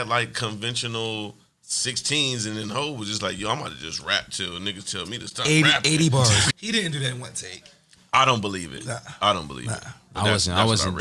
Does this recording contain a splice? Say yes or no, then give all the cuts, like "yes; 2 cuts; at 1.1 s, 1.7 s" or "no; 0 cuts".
yes; 1 cut; at 6.5 s